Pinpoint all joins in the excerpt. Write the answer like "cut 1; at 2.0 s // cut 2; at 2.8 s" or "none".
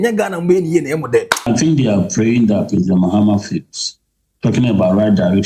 cut 1; at 1.5 s